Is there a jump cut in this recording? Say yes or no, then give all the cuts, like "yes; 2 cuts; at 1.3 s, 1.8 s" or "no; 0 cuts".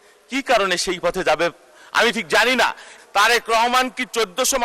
yes; 1 cut; at 2.9 s